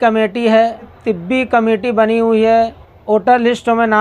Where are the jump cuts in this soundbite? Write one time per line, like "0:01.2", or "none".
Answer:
0:01.0
0:02.9